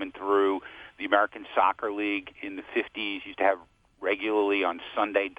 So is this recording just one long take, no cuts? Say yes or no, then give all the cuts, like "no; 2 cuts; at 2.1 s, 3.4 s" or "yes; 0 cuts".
yes; 0 cuts